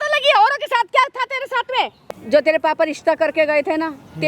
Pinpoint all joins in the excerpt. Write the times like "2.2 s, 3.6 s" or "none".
1.9 s

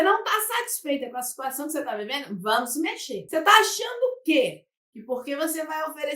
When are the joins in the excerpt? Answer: 3.1 s

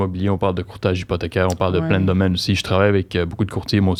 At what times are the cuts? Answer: none

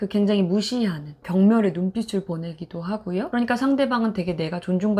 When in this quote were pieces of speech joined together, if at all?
1.1 s

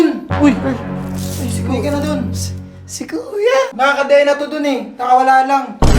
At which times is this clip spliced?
3.7 s

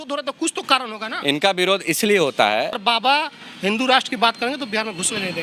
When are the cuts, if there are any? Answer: 2.8 s

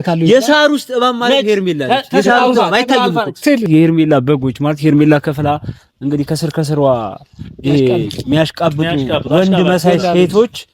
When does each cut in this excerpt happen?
3.7 s

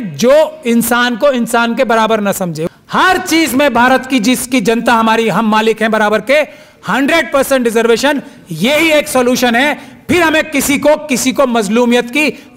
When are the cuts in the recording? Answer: 2.6 s

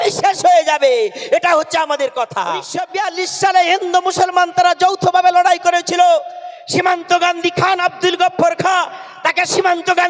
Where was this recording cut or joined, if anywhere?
2.8 s

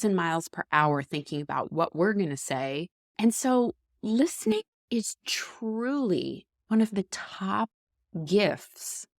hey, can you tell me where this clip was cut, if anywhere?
3.0 s

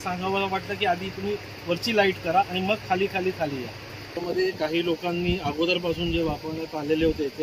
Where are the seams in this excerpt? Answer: 4.2 s

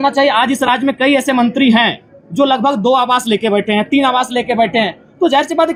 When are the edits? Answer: none

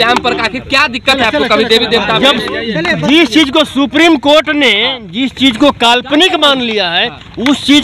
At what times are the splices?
none

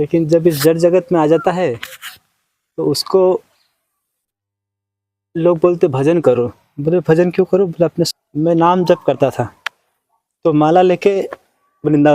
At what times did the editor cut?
8.1 s

